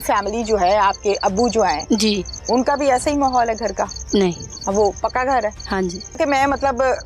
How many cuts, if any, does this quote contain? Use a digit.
1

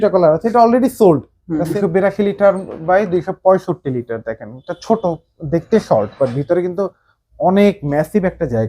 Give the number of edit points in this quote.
1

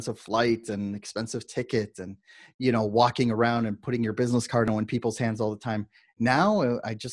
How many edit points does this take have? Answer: 1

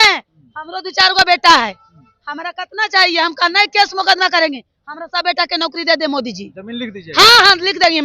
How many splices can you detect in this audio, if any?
0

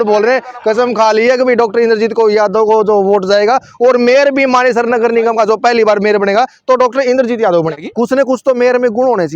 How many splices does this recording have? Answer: 1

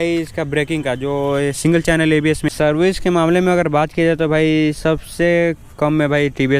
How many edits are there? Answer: 1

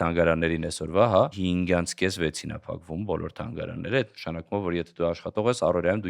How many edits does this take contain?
1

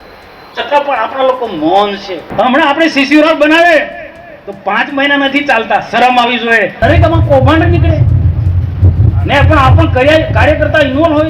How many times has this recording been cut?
2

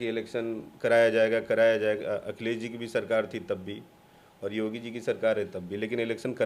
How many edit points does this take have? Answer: 0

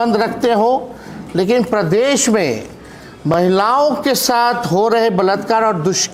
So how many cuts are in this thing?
0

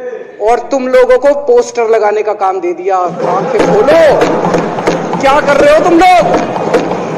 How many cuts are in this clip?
0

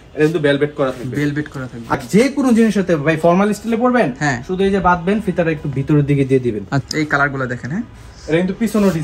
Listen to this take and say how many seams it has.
2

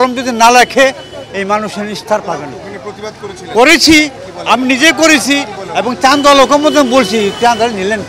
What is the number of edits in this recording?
0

